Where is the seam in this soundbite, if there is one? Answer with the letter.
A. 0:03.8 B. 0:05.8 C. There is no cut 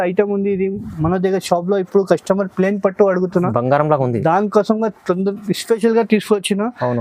C